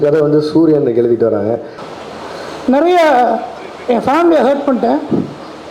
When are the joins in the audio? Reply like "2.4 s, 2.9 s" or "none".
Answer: 1.8 s